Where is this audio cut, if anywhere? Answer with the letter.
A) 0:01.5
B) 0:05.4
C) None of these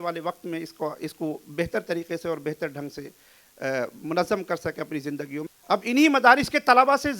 B